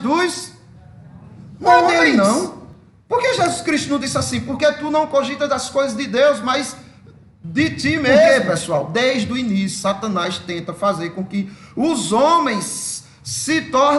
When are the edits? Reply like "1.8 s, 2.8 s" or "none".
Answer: 1.9 s, 8.3 s